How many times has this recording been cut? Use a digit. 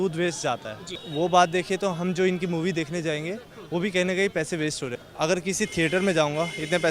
2